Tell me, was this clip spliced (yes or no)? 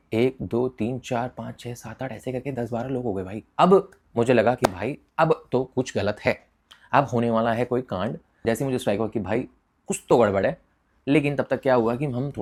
no